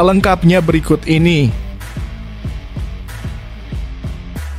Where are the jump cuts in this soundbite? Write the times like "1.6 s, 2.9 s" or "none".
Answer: 2.0 s